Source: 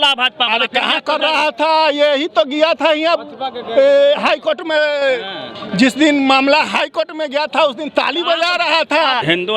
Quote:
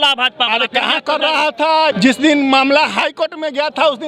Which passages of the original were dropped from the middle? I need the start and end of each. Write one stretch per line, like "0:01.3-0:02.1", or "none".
0:01.9-0:05.7